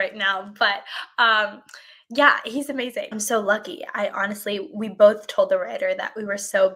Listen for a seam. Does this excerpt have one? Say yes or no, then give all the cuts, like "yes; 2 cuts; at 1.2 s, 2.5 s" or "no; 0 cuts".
yes; 1 cut; at 3.2 s